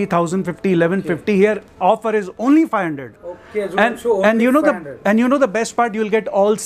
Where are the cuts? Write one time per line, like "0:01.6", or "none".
none